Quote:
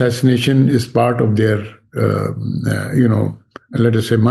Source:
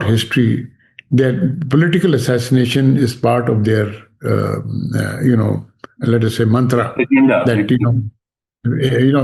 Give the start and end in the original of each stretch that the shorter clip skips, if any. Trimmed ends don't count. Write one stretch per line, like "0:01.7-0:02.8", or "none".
none